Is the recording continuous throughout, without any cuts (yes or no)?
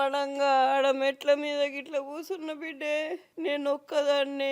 no